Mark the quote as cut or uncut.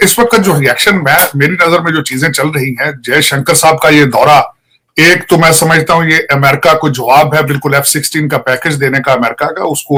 uncut